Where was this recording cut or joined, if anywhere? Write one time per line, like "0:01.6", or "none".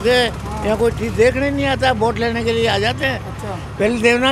none